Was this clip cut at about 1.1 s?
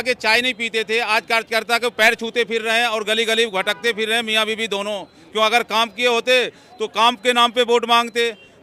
no; 0 cuts

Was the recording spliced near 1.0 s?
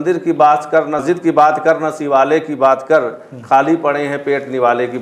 yes; 1 cut; at 1.0 s

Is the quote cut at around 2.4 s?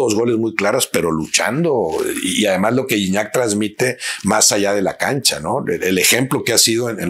no; 0 cuts

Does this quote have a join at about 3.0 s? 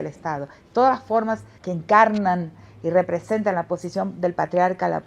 no; 1 cut; at 1.6 s

